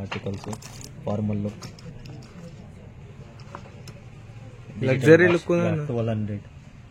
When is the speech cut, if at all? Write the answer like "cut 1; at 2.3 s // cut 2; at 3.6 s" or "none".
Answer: none